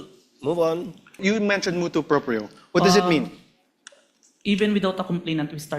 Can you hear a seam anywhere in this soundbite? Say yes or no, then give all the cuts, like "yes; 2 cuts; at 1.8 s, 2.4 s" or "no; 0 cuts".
yes; 1 cut; at 1.2 s